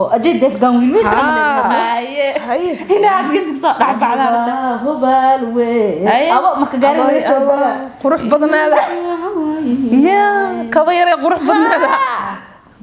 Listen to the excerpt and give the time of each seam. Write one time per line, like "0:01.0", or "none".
none